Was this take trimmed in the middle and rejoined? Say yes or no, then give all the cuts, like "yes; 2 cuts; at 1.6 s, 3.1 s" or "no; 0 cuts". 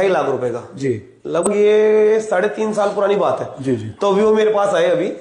yes; 1 cut; at 1.5 s